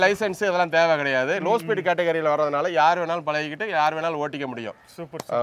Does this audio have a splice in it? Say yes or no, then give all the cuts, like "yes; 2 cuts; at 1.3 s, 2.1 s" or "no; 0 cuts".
no; 0 cuts